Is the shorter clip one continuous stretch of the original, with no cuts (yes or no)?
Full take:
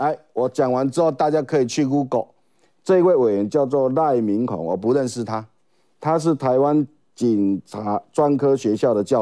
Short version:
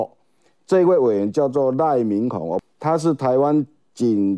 no